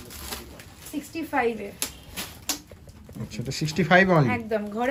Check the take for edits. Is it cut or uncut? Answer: uncut